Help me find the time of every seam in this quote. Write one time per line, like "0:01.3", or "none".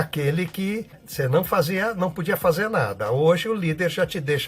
0:01.0